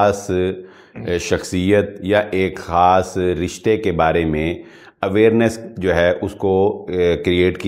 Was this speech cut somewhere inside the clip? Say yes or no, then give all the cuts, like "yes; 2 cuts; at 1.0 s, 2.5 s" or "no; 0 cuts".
no; 0 cuts